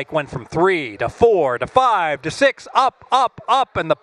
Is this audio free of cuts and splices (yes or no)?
yes